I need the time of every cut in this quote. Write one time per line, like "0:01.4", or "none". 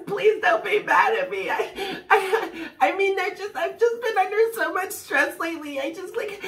none

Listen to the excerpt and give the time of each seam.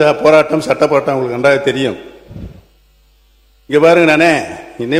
none

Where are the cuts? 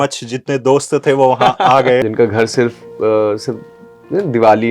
0:02.0

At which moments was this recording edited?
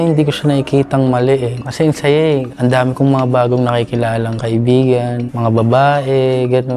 0:01.6
0:02.5
0:05.3

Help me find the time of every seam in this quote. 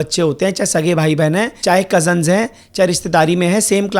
0:01.5

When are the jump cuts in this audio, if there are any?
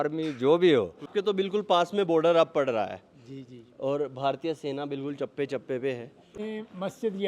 0:01.1
0:06.4

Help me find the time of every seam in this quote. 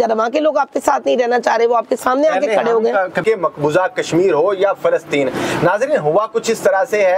0:03.2

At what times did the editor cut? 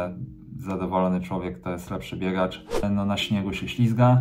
0:02.8

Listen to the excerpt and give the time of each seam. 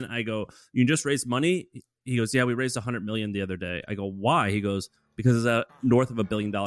0:05.7

